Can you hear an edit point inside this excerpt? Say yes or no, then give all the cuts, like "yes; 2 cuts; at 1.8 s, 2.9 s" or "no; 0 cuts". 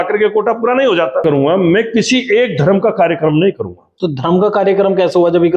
yes; 1 cut; at 1.1 s